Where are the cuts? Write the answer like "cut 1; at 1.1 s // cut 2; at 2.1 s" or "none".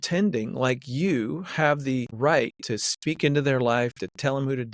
cut 1; at 2.1 s